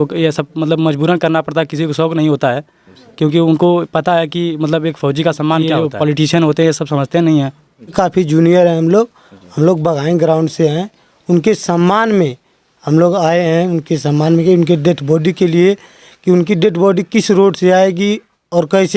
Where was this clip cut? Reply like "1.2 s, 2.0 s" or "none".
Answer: 5.7 s, 7.9 s